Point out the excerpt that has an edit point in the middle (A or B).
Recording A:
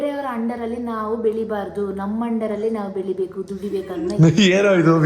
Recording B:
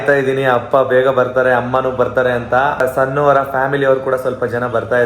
B